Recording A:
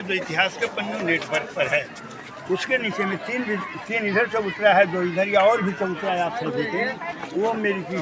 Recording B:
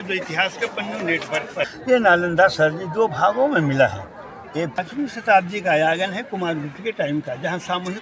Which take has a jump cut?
B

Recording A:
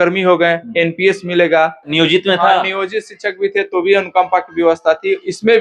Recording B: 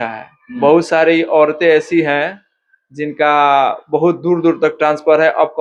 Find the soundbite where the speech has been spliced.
A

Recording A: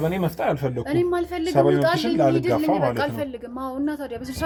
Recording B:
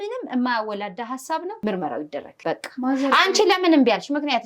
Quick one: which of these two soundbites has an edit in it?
B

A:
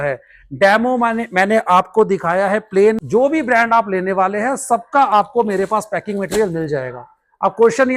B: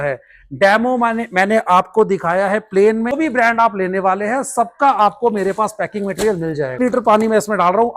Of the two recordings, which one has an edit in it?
B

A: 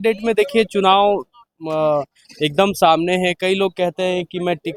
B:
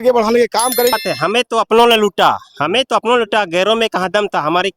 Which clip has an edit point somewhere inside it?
B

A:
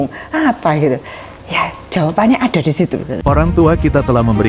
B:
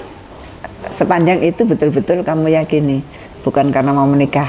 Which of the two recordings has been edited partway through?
A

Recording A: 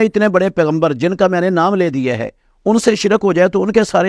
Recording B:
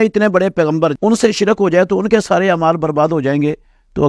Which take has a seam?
B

